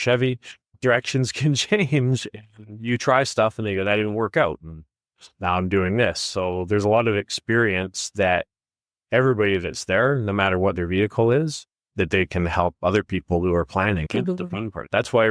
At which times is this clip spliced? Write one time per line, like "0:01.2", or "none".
none